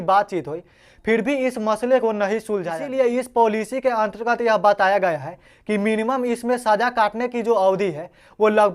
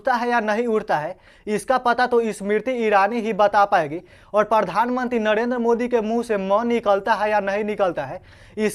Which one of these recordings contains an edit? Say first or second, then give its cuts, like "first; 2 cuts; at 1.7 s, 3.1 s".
first; 1 cut; at 2.8 s